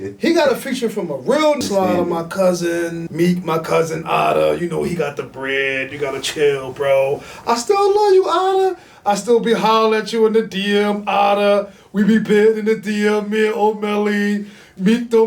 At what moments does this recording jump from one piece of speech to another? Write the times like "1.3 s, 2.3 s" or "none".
1.6 s, 3.0 s